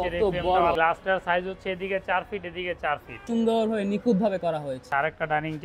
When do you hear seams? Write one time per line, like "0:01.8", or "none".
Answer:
0:00.7
0:03.2
0:04.9